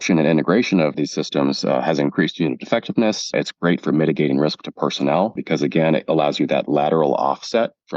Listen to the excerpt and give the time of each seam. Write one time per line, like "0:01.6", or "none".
0:00.9
0:03.3
0:05.4